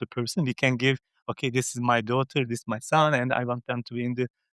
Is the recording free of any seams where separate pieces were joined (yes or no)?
yes